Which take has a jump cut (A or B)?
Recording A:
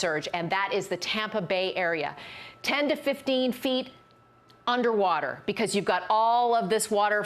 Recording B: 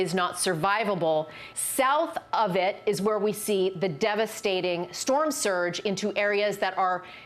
B